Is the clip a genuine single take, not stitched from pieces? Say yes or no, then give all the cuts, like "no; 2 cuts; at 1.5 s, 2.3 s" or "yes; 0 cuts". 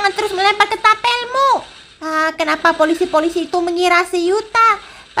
yes; 0 cuts